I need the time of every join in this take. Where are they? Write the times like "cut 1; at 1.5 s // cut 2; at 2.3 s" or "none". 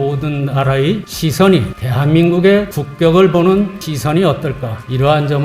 none